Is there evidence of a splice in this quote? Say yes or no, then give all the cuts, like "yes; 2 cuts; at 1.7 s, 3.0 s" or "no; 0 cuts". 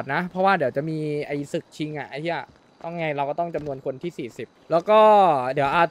yes; 1 cut; at 4.5 s